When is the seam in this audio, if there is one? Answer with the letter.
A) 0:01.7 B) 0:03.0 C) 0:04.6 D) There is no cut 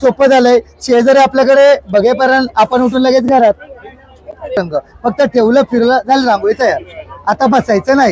C